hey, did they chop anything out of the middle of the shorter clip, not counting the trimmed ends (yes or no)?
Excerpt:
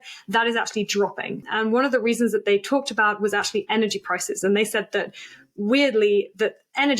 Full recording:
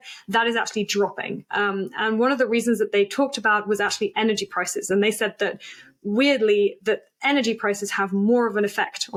yes